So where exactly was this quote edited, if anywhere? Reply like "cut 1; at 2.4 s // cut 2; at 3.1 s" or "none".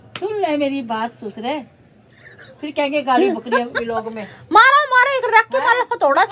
none